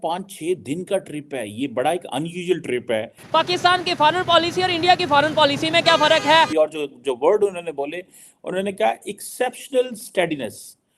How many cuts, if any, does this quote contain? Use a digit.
2